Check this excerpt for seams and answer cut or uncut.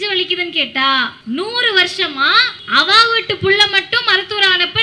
cut